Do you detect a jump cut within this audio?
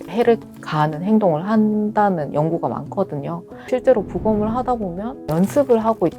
yes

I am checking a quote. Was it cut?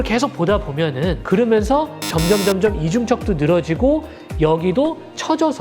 yes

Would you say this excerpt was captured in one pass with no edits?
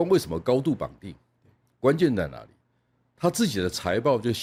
yes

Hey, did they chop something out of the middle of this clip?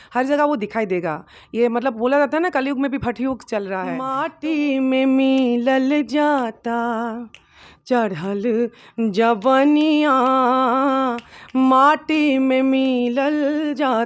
yes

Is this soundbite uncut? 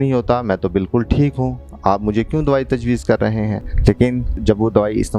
yes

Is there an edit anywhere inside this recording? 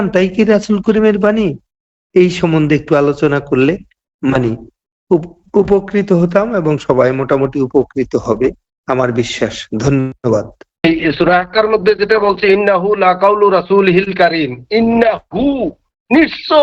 yes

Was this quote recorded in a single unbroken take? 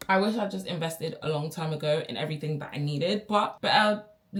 yes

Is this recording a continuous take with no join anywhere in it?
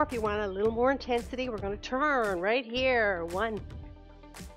no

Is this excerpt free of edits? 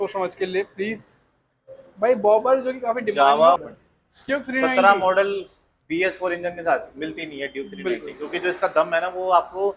no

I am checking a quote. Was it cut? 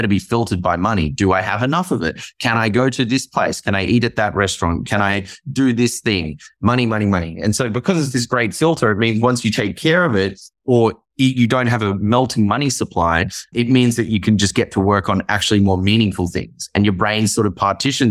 yes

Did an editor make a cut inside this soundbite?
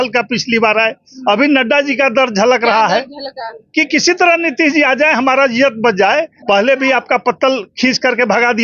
yes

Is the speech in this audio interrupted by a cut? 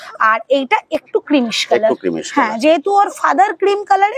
no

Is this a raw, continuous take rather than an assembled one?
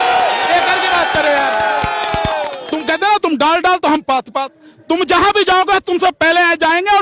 no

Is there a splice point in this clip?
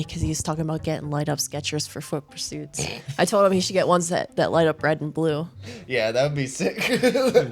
no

